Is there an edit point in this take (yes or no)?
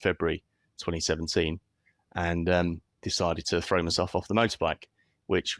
no